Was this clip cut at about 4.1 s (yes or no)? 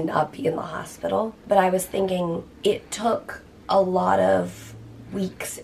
no